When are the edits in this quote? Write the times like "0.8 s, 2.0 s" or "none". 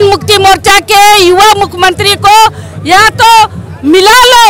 none